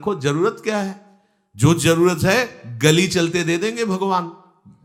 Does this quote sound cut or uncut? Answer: uncut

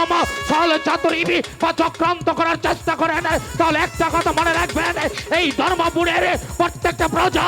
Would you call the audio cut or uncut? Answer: uncut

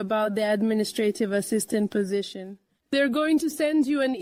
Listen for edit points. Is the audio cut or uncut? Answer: uncut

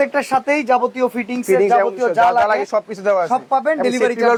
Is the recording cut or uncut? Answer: uncut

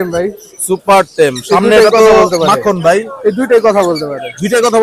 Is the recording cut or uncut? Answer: uncut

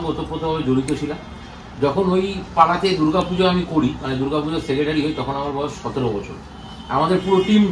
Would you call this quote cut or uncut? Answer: uncut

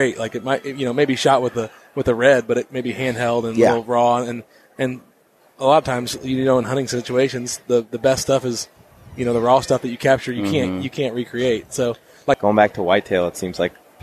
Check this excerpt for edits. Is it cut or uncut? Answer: cut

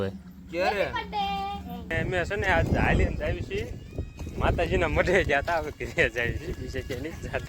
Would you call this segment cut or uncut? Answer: cut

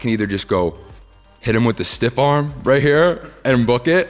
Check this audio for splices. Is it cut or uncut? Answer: uncut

